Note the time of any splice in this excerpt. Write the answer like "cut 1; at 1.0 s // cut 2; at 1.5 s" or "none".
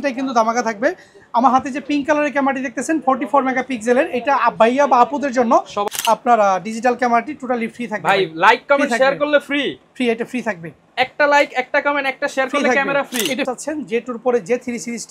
cut 1; at 5.8 s // cut 2; at 13.5 s